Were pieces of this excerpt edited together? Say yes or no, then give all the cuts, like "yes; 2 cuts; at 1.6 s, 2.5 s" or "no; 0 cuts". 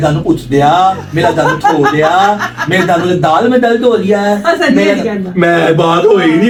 no; 0 cuts